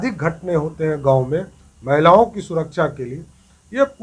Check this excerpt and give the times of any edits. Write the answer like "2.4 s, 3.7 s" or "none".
none